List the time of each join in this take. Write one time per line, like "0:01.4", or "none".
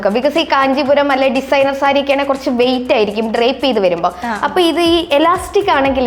none